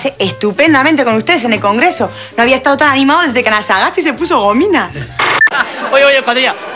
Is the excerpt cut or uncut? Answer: cut